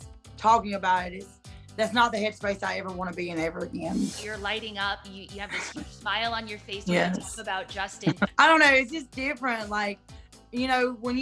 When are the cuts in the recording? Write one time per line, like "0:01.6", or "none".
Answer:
0:04.2
0:08.3